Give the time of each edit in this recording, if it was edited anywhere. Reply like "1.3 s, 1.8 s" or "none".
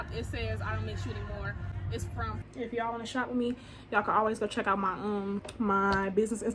2.4 s, 5.5 s